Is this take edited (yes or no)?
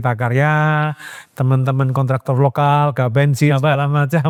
no